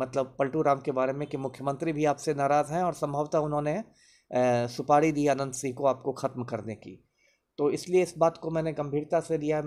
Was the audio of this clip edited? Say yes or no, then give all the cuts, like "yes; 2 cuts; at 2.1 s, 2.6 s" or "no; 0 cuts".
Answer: no; 0 cuts